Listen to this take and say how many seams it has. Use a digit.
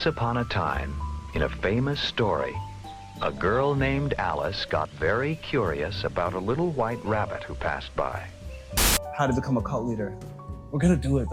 1